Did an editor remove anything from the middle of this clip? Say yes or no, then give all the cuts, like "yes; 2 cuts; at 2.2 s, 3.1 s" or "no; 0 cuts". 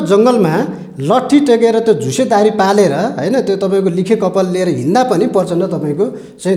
no; 0 cuts